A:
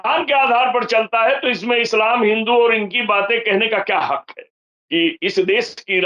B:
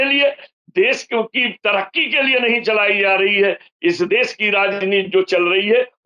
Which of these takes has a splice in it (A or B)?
A